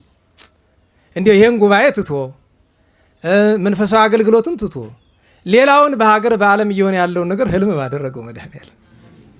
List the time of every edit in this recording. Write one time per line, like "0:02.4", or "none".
none